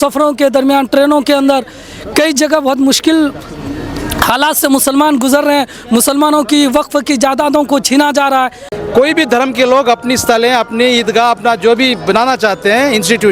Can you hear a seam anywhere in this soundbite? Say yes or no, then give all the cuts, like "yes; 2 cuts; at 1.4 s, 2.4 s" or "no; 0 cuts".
yes; 1 cut; at 8.7 s